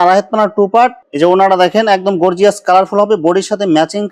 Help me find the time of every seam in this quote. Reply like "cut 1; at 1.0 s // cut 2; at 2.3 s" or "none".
cut 1; at 1.0 s